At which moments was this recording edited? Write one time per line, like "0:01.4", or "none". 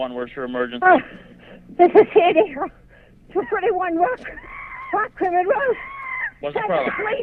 none